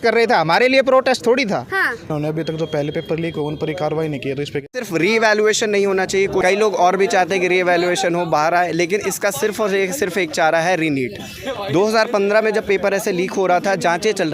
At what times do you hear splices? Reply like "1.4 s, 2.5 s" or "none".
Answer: 2.1 s, 4.8 s, 6.4 s